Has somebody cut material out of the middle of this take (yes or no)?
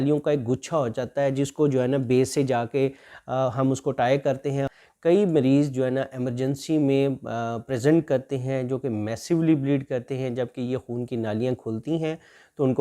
yes